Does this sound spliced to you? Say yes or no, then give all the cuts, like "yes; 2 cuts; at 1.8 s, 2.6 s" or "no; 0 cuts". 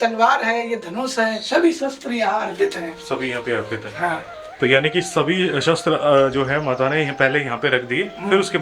no; 0 cuts